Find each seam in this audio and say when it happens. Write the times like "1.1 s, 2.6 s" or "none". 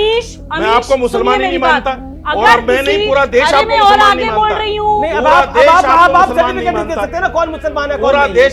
none